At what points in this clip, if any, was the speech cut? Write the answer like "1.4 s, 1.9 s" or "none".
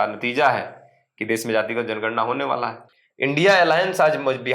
2.8 s